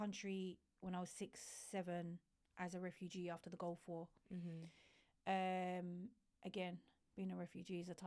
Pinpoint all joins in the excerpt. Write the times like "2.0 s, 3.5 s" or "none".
none